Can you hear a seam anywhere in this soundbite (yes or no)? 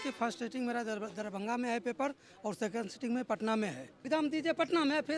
yes